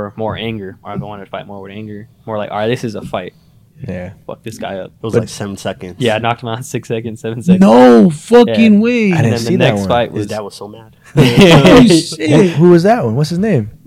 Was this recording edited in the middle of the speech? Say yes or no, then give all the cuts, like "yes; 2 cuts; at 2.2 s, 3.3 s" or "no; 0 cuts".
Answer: no; 0 cuts